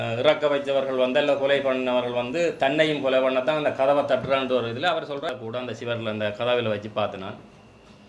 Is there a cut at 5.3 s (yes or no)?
yes